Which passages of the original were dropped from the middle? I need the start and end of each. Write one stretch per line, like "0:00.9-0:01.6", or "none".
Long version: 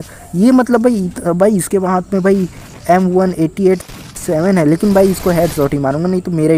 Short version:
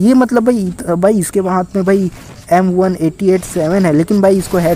0:03.9-0:04.2